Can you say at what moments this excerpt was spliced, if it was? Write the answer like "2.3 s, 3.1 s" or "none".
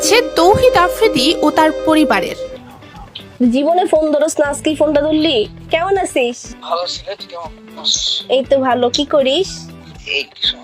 2.4 s